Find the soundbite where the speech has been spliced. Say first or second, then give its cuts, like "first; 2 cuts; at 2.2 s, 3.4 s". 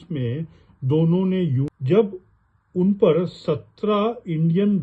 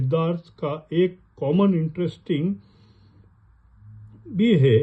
first; 1 cut; at 1.7 s